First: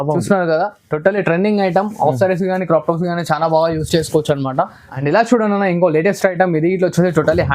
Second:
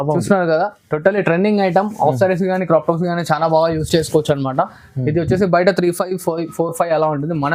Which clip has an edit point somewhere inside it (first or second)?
first